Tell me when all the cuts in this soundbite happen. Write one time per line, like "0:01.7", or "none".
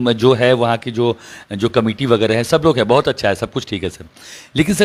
none